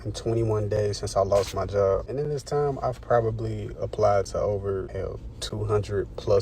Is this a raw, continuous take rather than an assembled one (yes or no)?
no